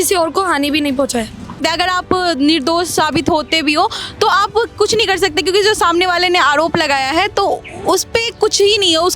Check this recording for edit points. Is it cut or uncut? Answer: cut